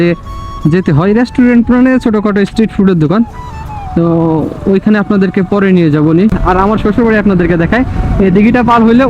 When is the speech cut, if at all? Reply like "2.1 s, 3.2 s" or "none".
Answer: 6.4 s